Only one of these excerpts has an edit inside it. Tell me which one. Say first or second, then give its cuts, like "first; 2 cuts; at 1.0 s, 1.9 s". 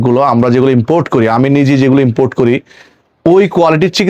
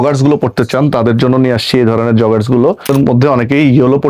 second; 1 cut; at 2.9 s